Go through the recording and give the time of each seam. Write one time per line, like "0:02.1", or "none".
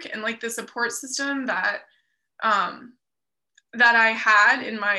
none